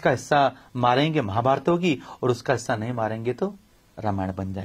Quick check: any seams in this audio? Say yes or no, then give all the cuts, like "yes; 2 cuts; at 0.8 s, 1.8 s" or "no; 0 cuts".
no; 0 cuts